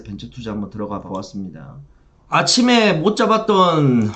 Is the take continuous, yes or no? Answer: yes